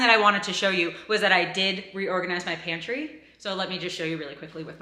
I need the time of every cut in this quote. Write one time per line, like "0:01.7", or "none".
none